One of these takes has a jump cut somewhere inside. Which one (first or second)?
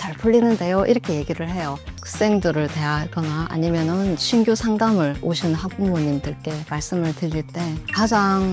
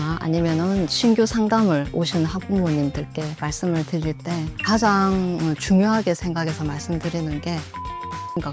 first